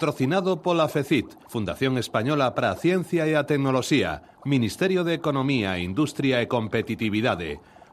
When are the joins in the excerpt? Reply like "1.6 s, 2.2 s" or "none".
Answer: 1.4 s